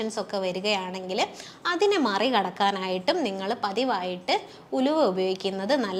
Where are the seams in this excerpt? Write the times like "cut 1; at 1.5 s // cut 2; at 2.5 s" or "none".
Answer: none